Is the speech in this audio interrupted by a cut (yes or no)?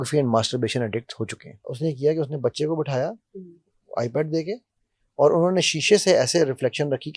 yes